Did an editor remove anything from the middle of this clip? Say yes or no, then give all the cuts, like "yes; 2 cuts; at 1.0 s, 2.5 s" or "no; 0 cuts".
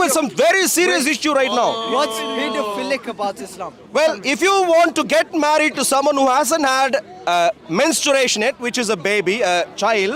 no; 0 cuts